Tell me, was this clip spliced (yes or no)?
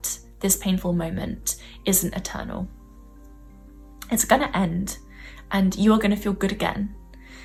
no